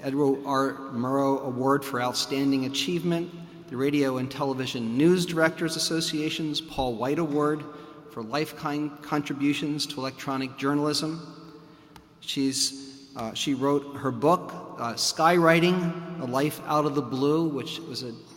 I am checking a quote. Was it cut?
yes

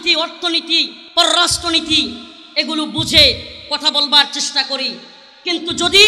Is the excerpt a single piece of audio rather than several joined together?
no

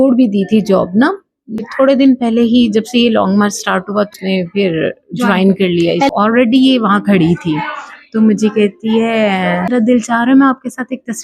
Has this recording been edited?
yes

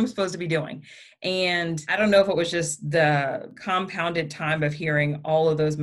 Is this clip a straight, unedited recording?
no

